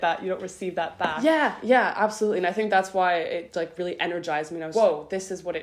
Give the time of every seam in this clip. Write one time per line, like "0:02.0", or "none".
0:01.2
0:04.7